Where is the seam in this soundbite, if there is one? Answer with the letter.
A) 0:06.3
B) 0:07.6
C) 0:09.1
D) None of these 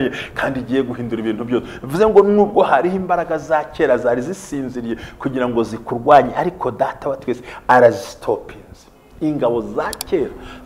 D